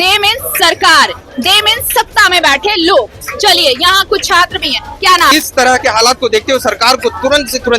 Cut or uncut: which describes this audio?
cut